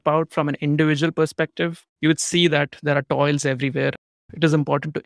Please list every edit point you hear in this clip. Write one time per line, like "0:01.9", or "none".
0:04.0